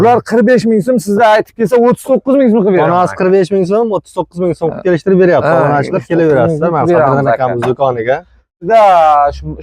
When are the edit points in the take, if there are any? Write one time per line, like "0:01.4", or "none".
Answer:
0:08.6